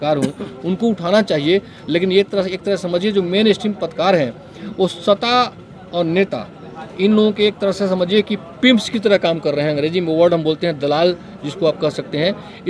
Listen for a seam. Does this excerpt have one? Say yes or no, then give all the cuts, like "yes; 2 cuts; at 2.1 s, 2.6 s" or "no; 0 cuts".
no; 0 cuts